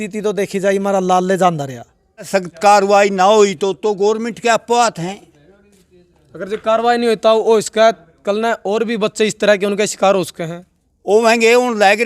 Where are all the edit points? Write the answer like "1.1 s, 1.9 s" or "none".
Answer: 2.3 s